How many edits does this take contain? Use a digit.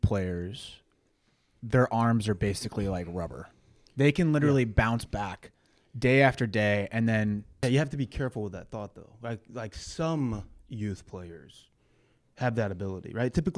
1